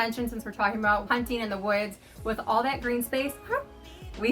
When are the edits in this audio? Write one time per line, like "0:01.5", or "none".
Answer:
0:01.0